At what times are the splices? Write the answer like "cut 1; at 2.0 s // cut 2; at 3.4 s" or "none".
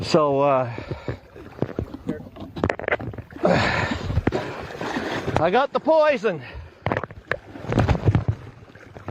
cut 1; at 4.4 s